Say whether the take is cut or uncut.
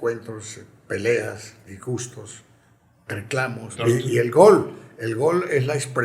cut